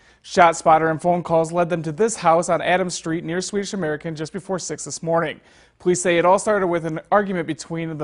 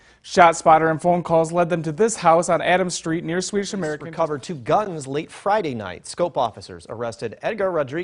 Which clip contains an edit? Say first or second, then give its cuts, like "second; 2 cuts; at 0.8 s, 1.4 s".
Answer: second; 1 cut; at 4.0 s